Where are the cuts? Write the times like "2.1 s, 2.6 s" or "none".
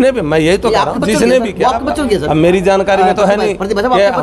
none